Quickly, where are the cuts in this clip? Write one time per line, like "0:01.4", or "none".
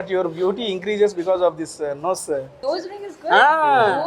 0:02.5